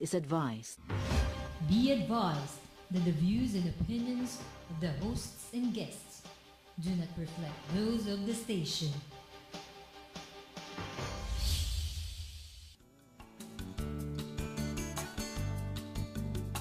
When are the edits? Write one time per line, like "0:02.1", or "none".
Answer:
none